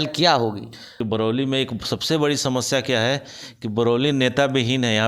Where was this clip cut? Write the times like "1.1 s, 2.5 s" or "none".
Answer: 1.0 s

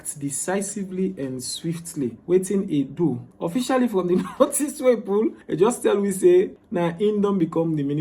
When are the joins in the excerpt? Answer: 2.2 s, 3.3 s, 5.4 s, 6.6 s

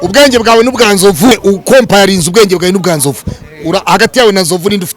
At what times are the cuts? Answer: 1.3 s

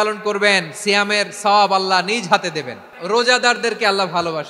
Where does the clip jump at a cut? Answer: 2.9 s

